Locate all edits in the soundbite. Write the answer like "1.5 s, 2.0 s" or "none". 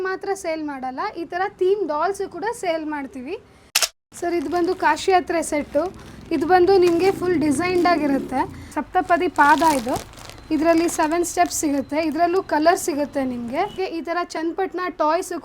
3.7 s, 8.7 s, 13.7 s